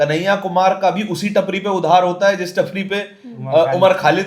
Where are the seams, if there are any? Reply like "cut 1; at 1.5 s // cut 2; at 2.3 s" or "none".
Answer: none